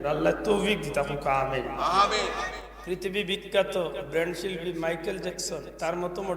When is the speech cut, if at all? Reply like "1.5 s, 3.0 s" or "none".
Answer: 2.6 s